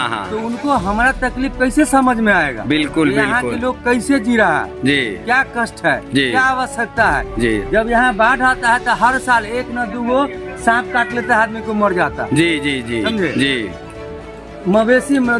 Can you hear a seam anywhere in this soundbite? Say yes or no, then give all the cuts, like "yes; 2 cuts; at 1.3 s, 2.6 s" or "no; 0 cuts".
no; 0 cuts